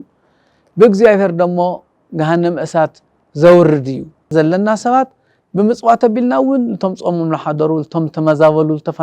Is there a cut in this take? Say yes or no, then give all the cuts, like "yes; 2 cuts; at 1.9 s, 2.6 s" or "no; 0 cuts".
yes; 1 cut; at 4.3 s